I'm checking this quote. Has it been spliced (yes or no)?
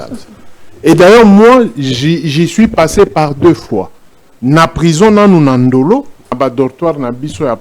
yes